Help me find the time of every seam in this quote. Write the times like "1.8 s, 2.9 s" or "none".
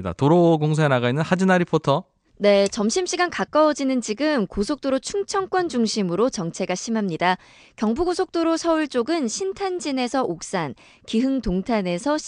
1.6 s